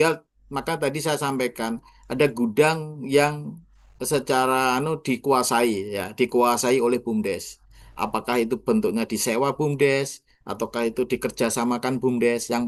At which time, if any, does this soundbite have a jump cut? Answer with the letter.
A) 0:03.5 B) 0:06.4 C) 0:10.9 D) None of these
D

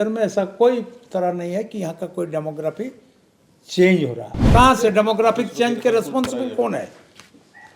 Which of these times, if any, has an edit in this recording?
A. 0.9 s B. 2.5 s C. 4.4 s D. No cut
C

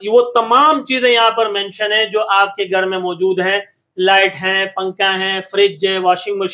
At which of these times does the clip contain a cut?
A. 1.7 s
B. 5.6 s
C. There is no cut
C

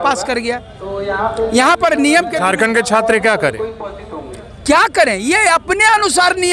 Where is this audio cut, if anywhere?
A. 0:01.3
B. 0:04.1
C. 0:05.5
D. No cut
D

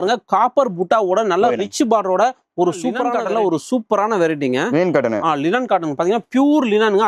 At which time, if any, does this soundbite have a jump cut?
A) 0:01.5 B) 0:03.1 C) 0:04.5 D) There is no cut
B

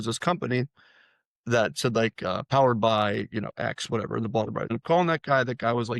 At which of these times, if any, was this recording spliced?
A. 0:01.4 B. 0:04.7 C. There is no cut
B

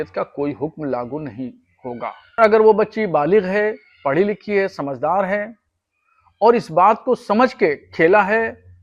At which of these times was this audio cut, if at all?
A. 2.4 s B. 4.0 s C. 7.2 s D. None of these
A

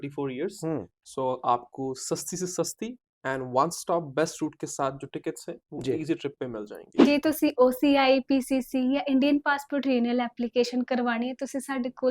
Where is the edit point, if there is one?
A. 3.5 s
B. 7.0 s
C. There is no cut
B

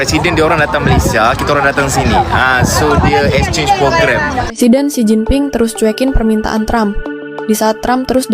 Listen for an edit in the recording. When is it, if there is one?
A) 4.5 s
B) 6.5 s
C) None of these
A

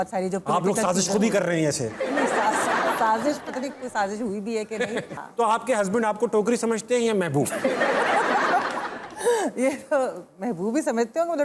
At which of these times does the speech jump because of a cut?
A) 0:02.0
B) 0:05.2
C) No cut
B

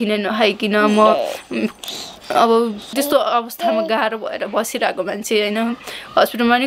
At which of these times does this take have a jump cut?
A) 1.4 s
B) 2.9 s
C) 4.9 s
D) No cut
B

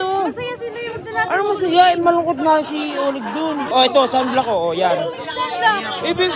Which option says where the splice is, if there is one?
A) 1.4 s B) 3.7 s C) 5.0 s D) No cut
B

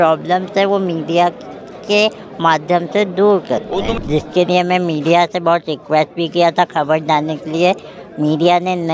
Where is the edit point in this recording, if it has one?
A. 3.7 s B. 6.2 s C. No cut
A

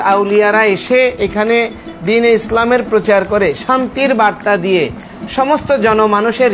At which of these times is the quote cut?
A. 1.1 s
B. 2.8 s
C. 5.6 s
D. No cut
D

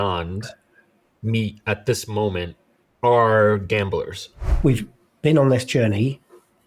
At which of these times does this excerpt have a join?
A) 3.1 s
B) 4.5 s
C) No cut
B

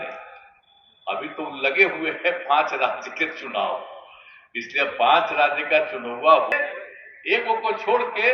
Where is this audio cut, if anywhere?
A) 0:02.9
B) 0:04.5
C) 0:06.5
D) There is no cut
C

